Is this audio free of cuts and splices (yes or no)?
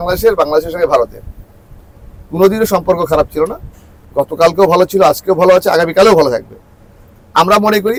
yes